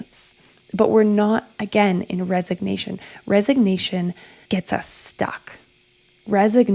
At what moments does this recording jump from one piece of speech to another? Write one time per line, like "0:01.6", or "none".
0:04.3